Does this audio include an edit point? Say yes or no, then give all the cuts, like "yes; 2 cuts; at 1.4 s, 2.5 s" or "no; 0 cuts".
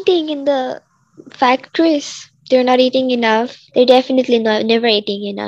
no; 0 cuts